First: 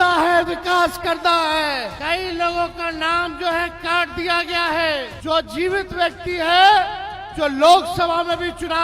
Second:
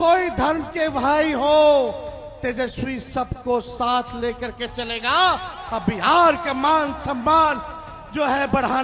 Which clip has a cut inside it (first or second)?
first